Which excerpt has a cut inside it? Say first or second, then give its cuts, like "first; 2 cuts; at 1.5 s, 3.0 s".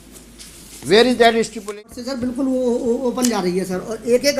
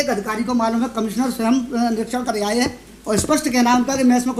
first; 1 cut; at 1.7 s